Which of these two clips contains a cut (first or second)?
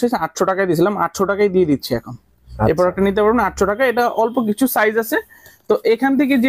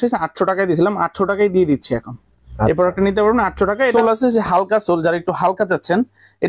second